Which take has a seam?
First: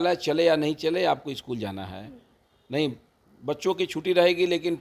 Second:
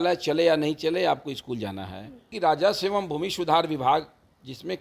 second; 1 cut; at 2.3 s

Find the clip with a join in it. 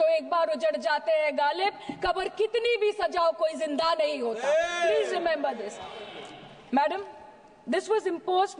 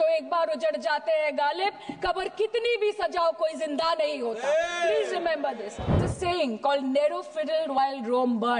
second; 1 cut; at 6.1 s

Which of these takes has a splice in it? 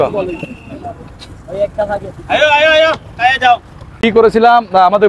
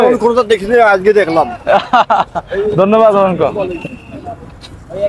first; 1 cut; at 4.0 s

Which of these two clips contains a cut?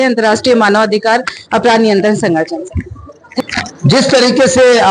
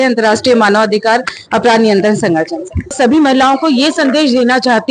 second; 1 cut; at 2.9 s

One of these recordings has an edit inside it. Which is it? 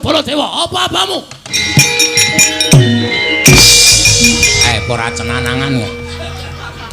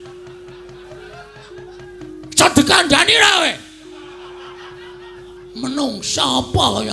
first; 2 cuts; at 1.6 s, 4.6 s

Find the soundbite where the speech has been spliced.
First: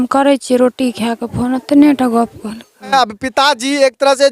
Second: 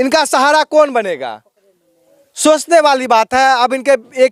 first; 1 cut; at 2.9 s

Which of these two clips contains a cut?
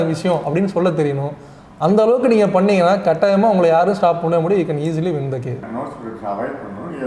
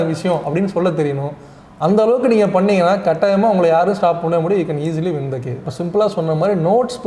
second; 1 cut; at 5.6 s

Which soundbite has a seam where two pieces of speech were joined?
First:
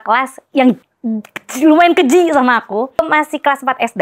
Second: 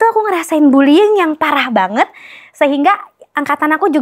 first; 2 cuts; at 0.9 s, 3.0 s

